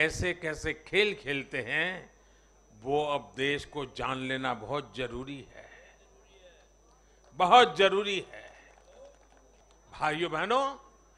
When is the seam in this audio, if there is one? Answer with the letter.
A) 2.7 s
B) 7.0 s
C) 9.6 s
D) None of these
C